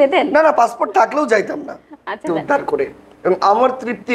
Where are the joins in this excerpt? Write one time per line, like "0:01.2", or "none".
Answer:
0:02.3